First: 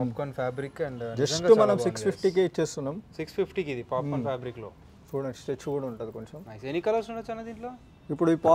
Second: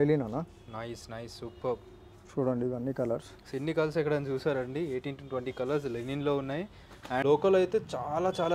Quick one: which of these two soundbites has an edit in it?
second; 1 cut; at 7.2 s

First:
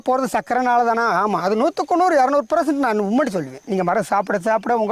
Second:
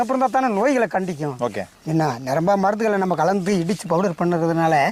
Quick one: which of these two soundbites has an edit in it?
first; 1 cut; at 3.6 s

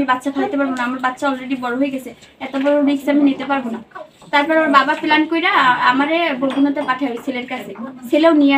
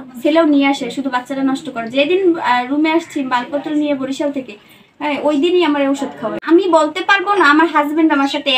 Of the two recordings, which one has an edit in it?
second; 1 cut; at 6.4 s

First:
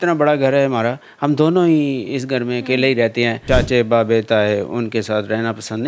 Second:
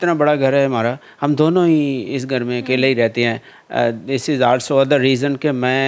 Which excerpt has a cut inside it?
first; 1 cut; at 3.4 s

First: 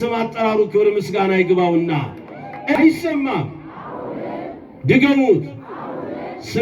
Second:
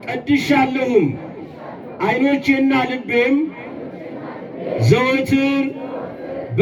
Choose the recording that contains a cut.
first; 1 cut; at 2.8 s

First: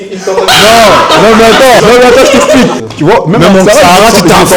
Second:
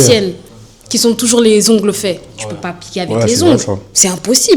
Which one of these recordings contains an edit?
first; 2 cuts; at 1.8 s, 2.8 s

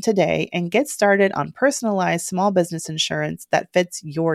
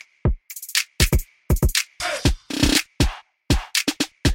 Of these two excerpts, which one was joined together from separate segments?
second; 1 cut; at 1.4 s

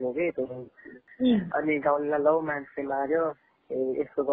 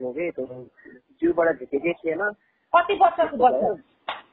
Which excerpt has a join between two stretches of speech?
first; 1 cut; at 1.0 s

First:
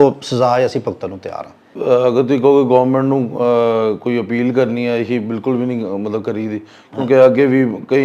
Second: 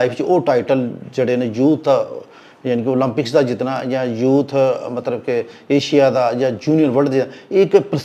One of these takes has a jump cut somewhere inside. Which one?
first; 1 cut; at 1.7 s

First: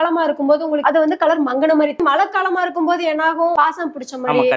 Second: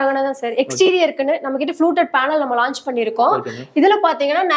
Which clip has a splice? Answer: first; 3 cuts; at 0.8 s, 2.0 s, 3.5 s

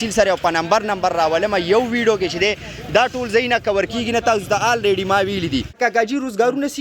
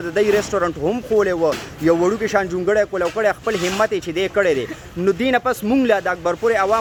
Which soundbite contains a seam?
first; 1 cut; at 5.8 s

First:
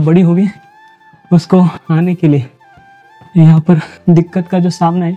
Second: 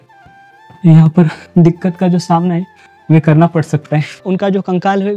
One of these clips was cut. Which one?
second; 1 cut; at 4.2 s

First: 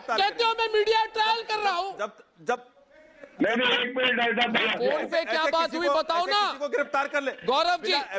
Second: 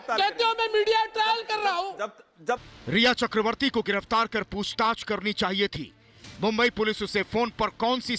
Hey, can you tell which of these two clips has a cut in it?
second; 1 cut; at 2.7 s

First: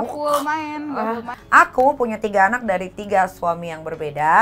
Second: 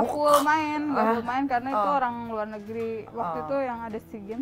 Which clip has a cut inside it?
first; 1 cut; at 1.3 s

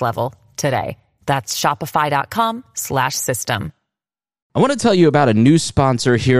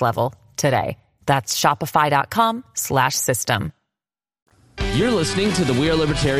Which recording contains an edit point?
first; 1 cut; at 4.5 s

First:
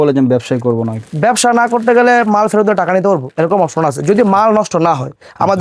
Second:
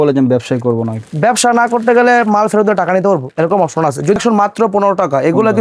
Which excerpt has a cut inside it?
second; 1 cut; at 4.2 s

